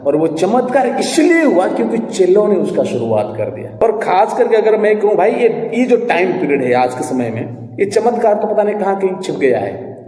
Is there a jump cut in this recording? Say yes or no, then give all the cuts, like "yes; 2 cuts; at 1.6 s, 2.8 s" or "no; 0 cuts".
yes; 1 cut; at 3.6 s